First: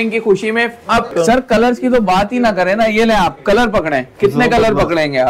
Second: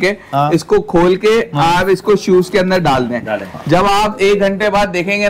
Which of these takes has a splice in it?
first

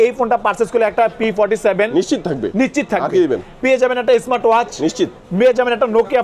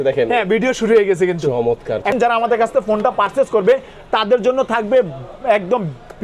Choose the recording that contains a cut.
second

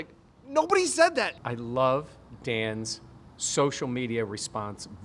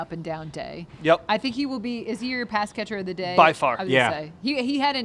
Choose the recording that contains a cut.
first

